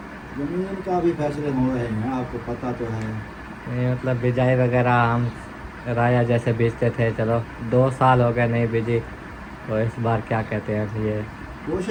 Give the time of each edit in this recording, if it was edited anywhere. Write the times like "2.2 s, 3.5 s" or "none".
none